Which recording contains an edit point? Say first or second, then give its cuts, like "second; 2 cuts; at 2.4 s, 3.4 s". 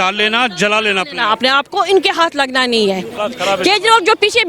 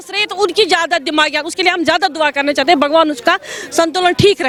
first; 1 cut; at 3.1 s